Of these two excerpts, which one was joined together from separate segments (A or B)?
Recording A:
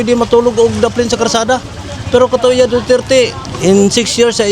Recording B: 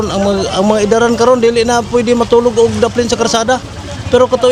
A